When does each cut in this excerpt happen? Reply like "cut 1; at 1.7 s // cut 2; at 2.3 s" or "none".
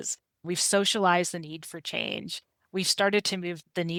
none